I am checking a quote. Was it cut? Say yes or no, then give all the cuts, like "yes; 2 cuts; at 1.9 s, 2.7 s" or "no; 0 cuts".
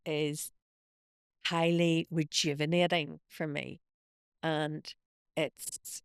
no; 0 cuts